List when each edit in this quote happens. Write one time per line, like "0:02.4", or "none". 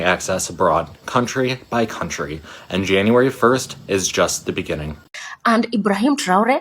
0:05.0